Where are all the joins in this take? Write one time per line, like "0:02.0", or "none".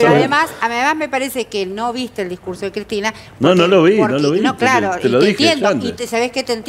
none